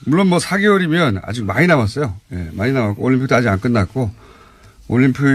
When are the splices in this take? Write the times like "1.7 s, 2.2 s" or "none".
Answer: 3.0 s